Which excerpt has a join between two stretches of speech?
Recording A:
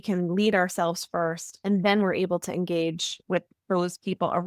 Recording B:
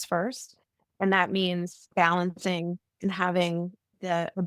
B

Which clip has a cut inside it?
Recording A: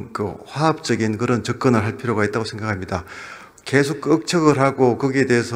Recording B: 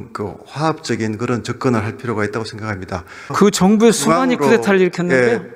B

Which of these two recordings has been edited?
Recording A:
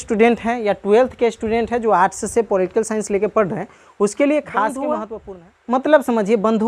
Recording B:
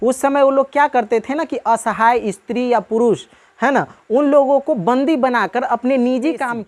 A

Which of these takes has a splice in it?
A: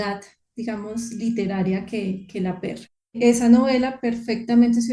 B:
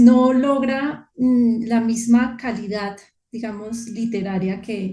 A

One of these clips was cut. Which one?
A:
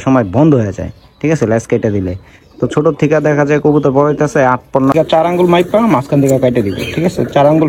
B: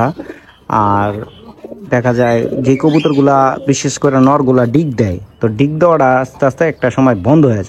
A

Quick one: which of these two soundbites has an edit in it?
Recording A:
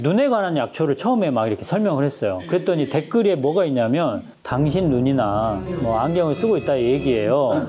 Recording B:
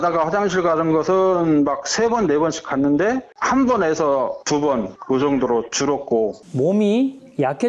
B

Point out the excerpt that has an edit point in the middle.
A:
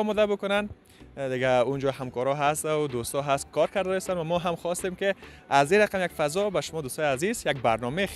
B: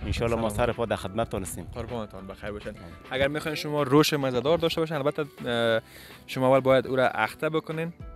B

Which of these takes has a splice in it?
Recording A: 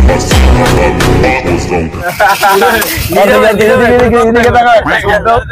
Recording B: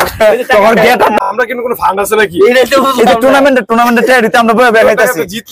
B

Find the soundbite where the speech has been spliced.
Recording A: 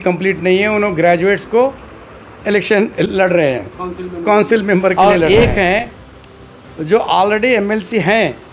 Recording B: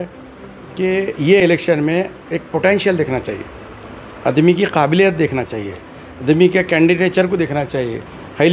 A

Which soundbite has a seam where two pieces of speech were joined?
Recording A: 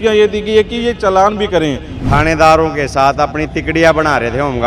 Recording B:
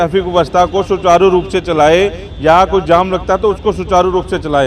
A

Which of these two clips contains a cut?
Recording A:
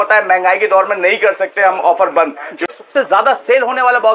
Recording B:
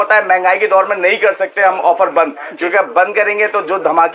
A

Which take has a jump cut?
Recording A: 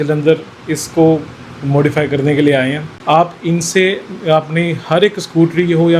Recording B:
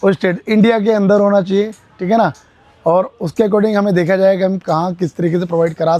A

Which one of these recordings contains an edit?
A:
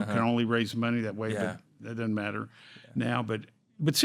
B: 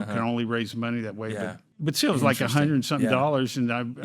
B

